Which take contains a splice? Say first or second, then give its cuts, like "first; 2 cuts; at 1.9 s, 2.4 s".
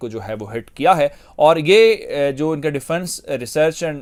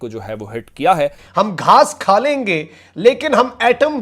second; 1 cut; at 1.2 s